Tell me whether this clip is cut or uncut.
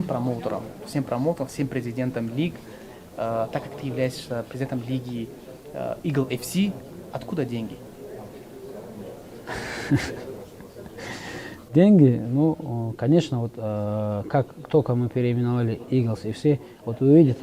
uncut